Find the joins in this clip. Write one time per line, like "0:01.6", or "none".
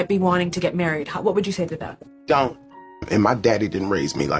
0:02.9